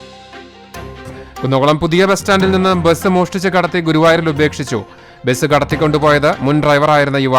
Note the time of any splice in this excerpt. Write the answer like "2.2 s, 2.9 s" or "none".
1.2 s